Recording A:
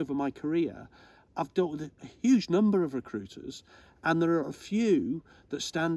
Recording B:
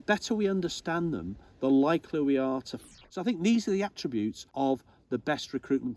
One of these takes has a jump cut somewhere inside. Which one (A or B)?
B